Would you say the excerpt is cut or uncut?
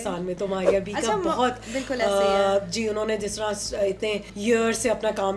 cut